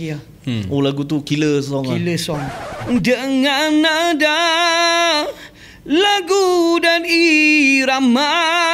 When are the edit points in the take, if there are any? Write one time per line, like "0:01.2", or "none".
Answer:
0:02.7